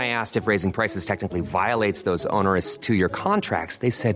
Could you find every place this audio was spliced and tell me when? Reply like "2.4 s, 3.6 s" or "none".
none